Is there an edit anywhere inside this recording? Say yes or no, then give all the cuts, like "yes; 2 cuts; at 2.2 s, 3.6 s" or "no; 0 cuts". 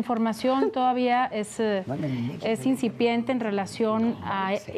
no; 0 cuts